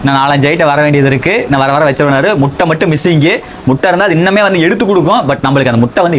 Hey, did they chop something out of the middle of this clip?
no; 0 cuts

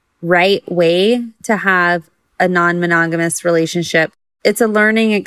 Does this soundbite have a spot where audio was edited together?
yes; 1 cut; at 4.2 s

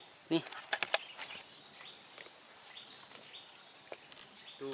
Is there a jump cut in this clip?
yes; 1 cut; at 1.3 s

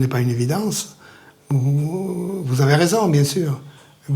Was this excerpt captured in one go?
yes; 0 cuts

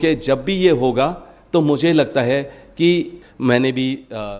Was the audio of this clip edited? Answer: yes; 1 cut; at 3.2 s

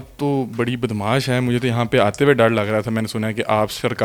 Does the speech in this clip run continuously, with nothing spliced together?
yes; 0 cuts

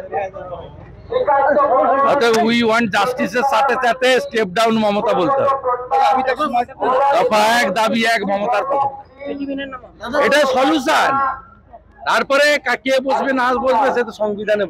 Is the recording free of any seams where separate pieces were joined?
yes; 0 cuts

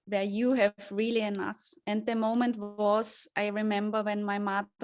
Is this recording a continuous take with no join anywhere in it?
yes; 0 cuts

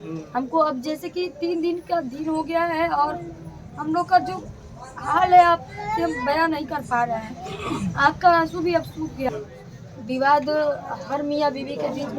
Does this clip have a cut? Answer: yes; 1 cut; at 9.3 s

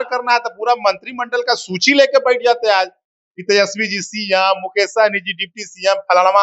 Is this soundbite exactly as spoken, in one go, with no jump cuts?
yes; 0 cuts

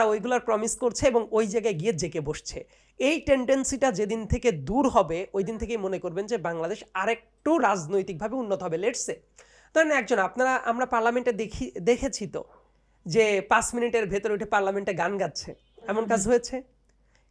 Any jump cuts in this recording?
no; 0 cuts

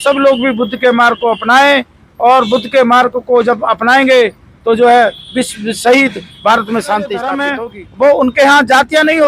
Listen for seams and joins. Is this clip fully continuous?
no; 1 cut; at 7.5 s

